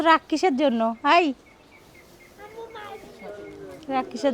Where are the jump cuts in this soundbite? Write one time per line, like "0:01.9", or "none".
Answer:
none